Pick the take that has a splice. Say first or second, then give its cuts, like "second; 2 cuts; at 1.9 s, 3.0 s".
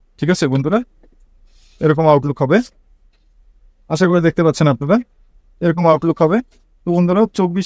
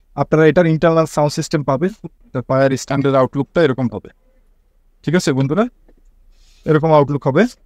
second; 1 cut; at 2.1 s